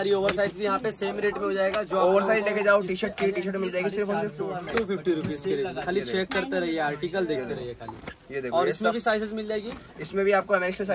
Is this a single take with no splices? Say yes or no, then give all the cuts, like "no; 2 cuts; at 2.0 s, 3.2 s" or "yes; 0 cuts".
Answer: yes; 0 cuts